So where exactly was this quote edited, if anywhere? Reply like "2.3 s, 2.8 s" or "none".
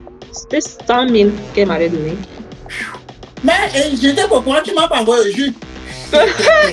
none